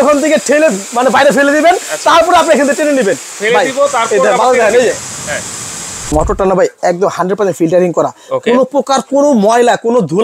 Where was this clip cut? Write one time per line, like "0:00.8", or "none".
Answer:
0:03.3
0:06.1